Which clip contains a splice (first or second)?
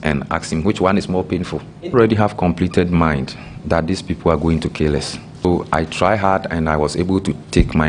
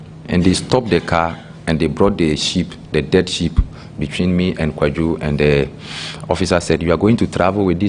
first